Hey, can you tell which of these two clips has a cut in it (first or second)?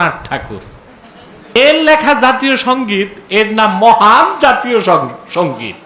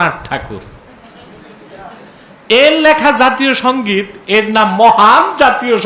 first